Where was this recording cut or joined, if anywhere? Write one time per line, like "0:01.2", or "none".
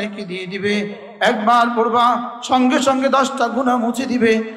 none